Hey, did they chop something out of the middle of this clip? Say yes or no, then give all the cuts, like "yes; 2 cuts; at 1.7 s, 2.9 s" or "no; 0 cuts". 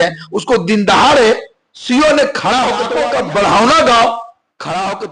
yes; 1 cut; at 2.9 s